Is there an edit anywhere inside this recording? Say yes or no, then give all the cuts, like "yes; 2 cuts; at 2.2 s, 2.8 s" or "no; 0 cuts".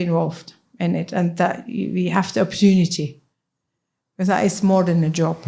no; 0 cuts